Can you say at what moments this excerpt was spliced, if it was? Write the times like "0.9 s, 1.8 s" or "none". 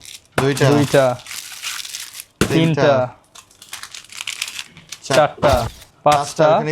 5.8 s